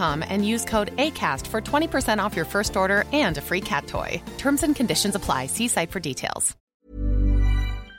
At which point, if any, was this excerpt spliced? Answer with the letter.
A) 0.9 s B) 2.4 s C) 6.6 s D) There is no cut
C